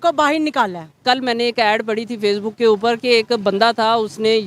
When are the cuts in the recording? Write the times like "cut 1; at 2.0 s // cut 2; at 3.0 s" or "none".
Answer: cut 1; at 1.0 s